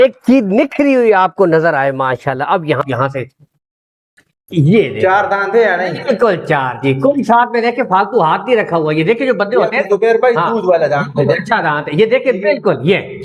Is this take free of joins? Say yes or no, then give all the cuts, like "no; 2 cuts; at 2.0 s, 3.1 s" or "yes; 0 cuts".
no; 1 cut; at 2.8 s